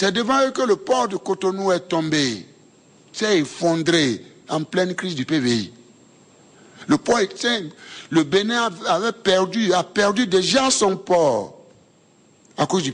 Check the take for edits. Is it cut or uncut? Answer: uncut